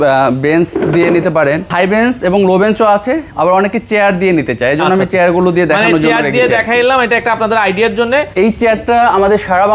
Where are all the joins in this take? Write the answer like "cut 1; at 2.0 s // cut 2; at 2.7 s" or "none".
cut 1; at 1.7 s // cut 2; at 8.3 s